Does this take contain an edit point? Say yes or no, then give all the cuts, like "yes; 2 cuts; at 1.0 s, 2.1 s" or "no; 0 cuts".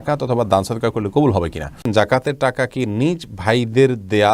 yes; 1 cut; at 1.9 s